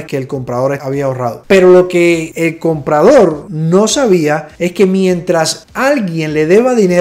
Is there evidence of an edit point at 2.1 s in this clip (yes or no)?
no